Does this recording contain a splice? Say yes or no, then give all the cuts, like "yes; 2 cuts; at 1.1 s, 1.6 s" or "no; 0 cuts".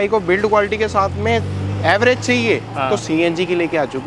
no; 0 cuts